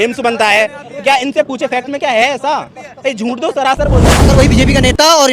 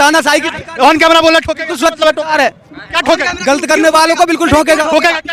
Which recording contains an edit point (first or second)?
first